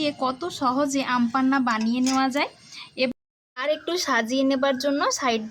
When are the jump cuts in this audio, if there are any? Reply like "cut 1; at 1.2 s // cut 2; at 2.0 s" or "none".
cut 1; at 3.1 s